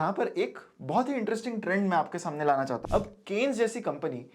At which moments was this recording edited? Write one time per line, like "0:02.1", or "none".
0:02.8